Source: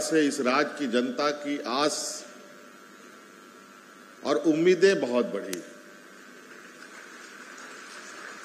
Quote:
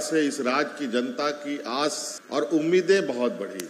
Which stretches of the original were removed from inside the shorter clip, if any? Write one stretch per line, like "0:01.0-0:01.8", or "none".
0:02.1-0:04.1